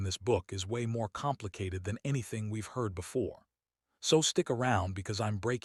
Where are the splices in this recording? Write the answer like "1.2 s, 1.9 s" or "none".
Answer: none

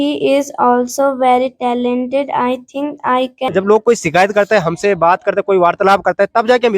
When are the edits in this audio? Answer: 3.5 s

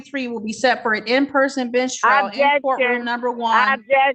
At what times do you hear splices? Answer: none

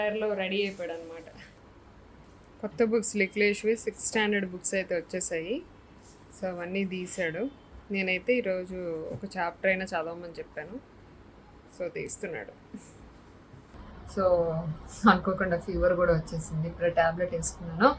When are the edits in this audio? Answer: 1.6 s, 13.6 s

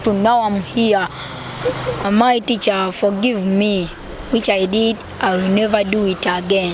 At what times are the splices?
2.0 s

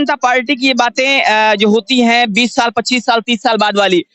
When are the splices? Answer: none

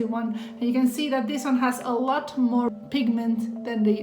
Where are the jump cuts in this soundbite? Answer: 2.8 s

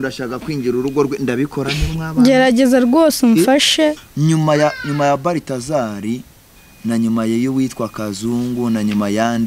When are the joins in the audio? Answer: 4.1 s

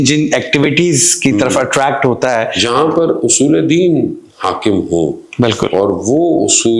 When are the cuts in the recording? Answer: 2.5 s

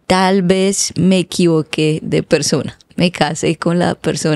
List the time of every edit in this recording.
none

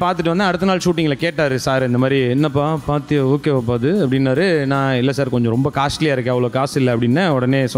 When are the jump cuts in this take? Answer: none

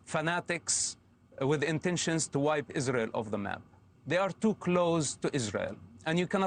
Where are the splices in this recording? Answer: none

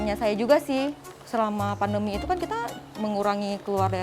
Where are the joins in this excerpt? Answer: 1.1 s

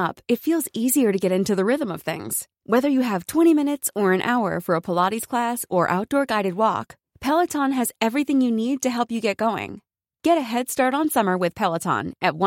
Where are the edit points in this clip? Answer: none

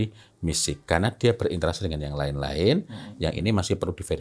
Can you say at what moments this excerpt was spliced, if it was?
none

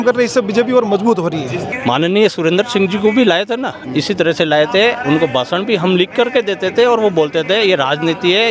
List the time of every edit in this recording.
1.7 s

